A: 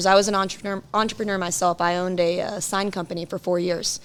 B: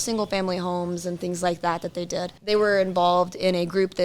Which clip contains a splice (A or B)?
B